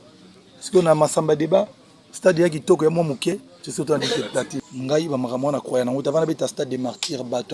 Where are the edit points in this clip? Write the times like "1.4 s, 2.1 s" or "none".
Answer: 4.6 s